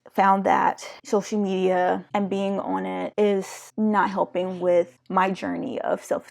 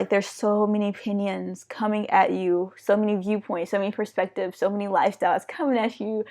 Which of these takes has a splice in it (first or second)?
first